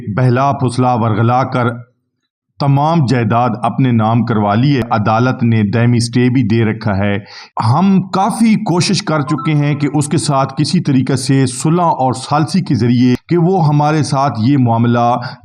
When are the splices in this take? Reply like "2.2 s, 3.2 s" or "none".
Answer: 4.8 s, 7.3 s, 13.2 s